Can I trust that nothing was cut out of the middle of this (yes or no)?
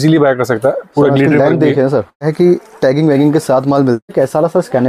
no